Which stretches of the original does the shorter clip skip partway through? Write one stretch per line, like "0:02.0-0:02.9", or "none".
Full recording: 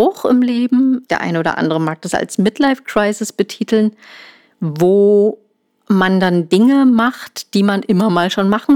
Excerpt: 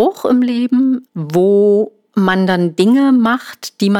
0:01.1-0:04.5
0:05.5-0:05.7